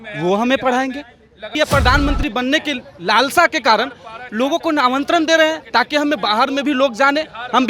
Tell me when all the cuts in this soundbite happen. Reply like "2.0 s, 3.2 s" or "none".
1.5 s

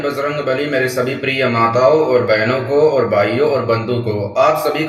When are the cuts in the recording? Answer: none

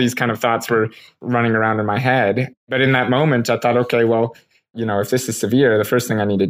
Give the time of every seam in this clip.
1.1 s, 2.7 s, 4.7 s

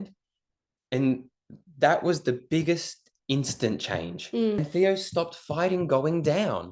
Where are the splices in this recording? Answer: 4.6 s

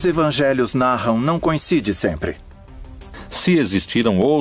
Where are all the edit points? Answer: none

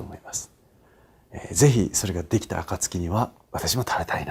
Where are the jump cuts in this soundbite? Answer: 3.4 s

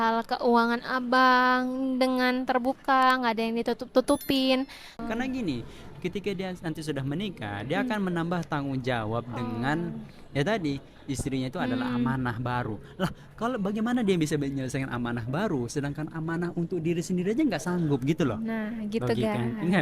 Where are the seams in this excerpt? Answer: 4.9 s

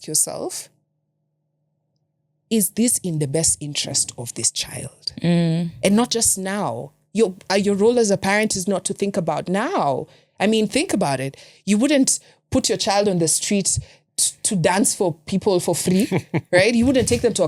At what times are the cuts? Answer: none

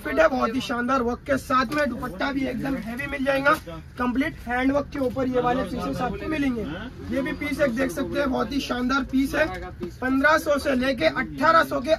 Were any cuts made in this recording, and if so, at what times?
none

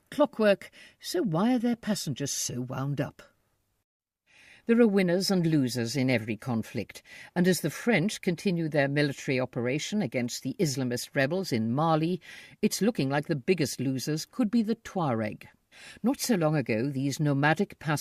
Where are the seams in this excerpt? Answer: none

